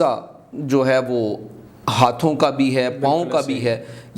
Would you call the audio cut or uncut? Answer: uncut